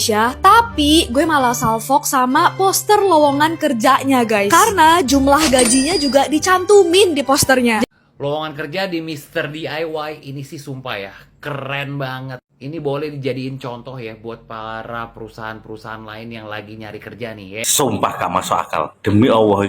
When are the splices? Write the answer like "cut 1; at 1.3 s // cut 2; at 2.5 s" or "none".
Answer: cut 1; at 7.8 s // cut 2; at 17.6 s